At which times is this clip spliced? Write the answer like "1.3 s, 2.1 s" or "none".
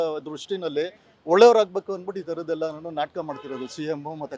none